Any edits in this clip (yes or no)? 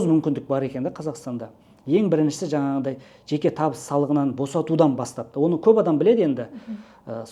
no